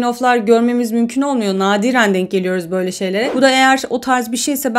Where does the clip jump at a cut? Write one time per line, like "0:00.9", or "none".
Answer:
0:03.3